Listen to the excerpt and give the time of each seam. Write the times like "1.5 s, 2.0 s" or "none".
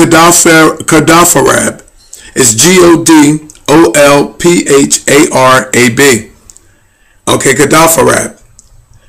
7.6 s